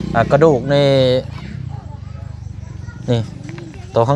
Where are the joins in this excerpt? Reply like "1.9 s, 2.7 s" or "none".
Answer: none